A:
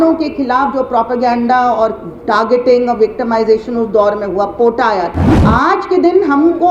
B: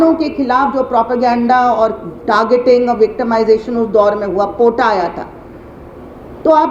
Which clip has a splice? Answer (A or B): A